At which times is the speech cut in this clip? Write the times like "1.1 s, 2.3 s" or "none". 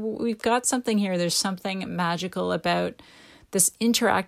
none